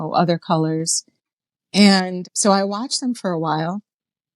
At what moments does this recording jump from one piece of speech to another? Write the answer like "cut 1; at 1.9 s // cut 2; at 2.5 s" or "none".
cut 1; at 2.3 s

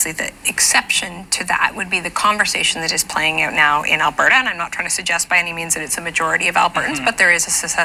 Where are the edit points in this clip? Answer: none

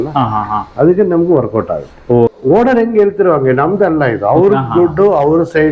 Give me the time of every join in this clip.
cut 1; at 2.3 s

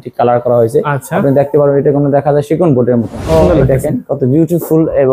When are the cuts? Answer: cut 1; at 3.4 s

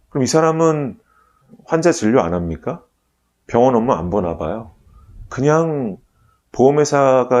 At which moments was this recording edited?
cut 1; at 1.0 s

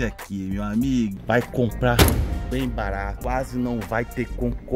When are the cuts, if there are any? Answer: cut 1; at 1.1 s // cut 2; at 3.1 s

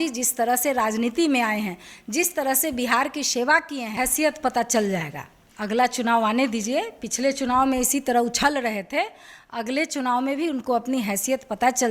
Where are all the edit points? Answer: cut 1; at 3.9 s

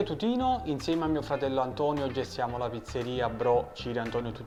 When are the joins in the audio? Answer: none

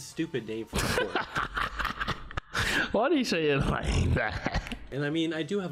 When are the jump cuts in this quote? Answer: cut 1; at 4.8 s

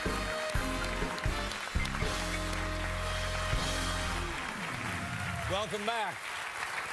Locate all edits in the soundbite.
none

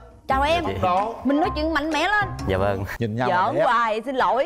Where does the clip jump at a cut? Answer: cut 1; at 2.9 s

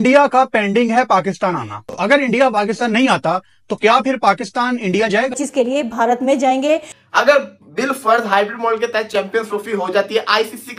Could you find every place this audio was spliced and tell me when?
cut 1; at 1.8 s // cut 2; at 5.4 s // cut 3; at 7.0 s

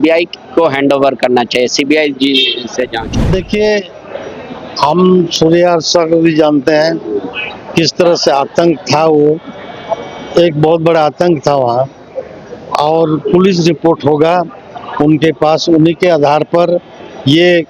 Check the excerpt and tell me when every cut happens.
none

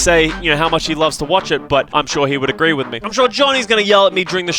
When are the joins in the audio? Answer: cut 1; at 1.9 s // cut 2; at 3.0 s

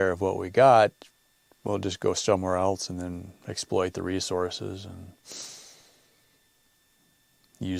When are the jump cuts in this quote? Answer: none

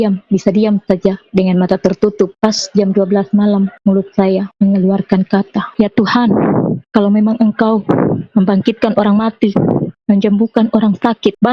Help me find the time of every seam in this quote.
cut 1; at 5.7 s

